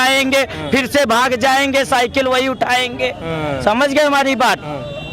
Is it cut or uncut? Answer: uncut